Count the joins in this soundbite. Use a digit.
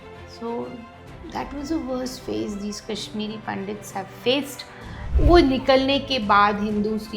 1